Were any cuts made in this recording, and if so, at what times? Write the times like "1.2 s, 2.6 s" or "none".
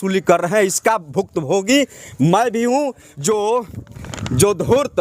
3.0 s